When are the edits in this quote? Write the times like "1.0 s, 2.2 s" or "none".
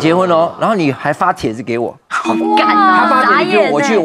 none